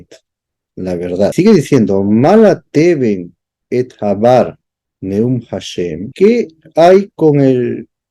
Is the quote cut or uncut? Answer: cut